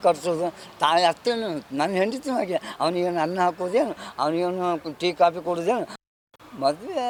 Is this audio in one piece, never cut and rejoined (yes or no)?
yes